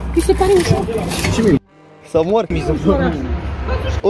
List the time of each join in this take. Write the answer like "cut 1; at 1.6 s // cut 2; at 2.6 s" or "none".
none